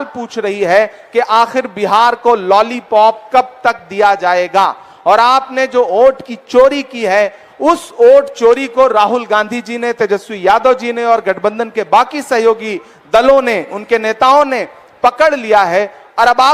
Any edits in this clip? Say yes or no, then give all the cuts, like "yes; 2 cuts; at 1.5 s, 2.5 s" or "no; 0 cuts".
no; 0 cuts